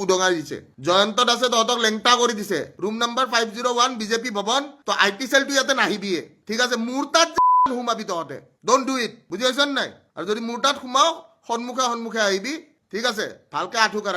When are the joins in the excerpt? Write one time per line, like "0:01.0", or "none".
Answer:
0:02.7
0:04.7
0:06.4
0:10.0